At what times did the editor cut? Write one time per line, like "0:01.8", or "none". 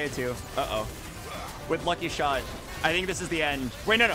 0:02.6